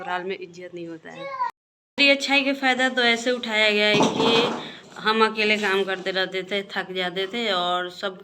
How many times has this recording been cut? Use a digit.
1